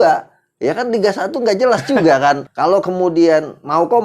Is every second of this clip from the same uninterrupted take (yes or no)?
yes